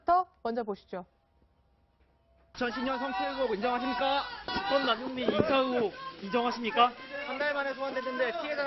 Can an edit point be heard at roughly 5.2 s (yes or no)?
no